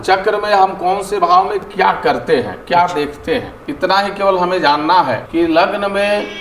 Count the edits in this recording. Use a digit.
2